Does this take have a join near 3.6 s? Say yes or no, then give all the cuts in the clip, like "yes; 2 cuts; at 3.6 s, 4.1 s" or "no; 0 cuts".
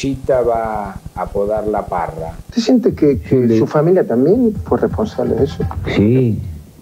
no; 1 cut; at 2.4 s